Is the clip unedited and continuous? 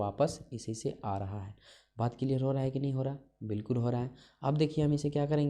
yes; 0 cuts

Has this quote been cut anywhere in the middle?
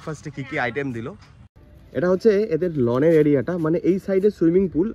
yes; 1 cut; at 1.3 s

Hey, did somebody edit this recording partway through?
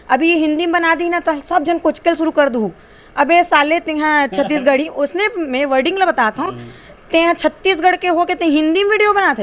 no; 0 cuts

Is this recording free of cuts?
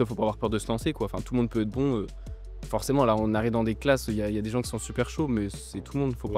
yes; 0 cuts

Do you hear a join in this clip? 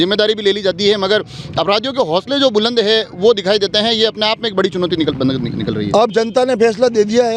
no; 0 cuts

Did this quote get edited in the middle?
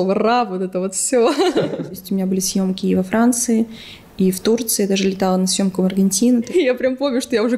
yes; 2 cuts; at 2.0 s, 6.5 s

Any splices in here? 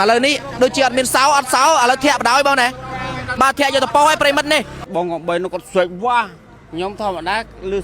yes; 1 cut; at 4.8 s

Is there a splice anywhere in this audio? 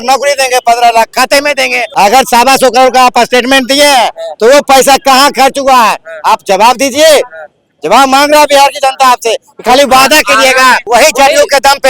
yes; 2 cuts; at 1.8 s, 10.8 s

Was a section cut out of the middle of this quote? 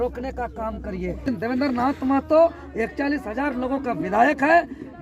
yes; 1 cut; at 1.3 s

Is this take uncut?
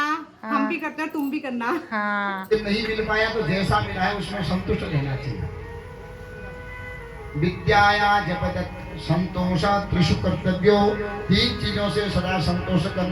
no; 1 cut; at 2.5 s

